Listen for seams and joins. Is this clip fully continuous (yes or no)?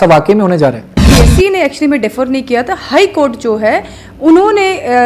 no